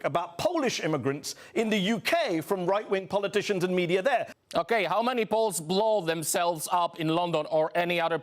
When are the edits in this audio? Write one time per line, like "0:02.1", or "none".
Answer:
0:04.3